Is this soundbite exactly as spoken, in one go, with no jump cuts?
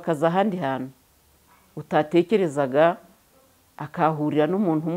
yes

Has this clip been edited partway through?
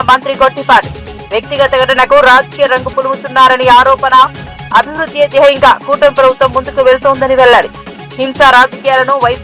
no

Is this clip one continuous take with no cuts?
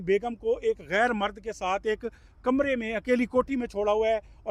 yes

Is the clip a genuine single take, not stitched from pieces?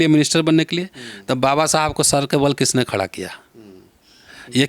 yes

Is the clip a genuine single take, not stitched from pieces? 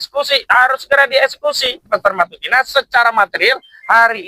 no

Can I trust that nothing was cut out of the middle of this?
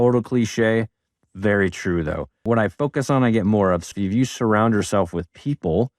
no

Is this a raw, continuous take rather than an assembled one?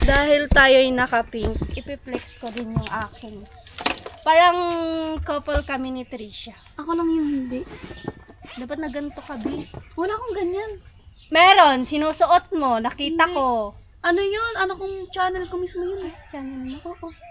yes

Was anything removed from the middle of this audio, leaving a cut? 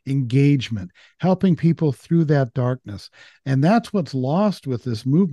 no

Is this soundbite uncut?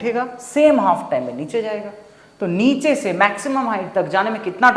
yes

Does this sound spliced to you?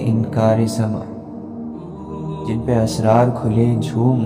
yes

